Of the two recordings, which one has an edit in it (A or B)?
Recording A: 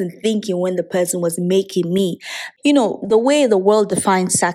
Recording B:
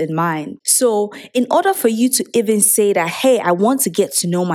A